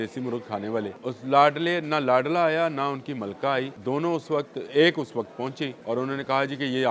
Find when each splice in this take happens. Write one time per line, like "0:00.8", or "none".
0:01.0
0:03.7
0:05.8